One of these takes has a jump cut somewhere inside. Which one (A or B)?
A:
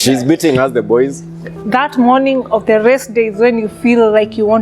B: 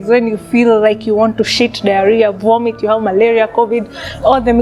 A